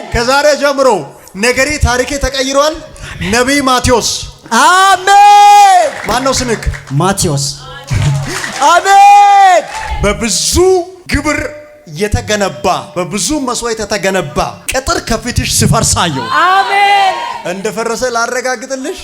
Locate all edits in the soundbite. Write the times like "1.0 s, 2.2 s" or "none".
6.0 s, 9.8 s, 11.0 s, 12.9 s, 14.6 s, 17.4 s